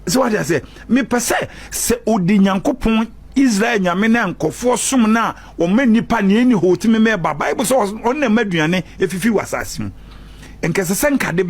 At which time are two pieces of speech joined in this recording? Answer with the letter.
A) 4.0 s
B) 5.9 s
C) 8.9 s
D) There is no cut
D